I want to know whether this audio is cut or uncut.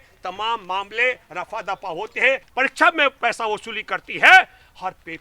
cut